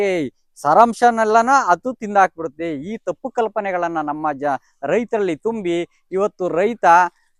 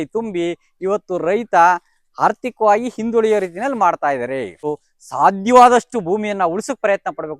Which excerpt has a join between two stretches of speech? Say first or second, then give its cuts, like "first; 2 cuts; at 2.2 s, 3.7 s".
second; 1 cut; at 4.6 s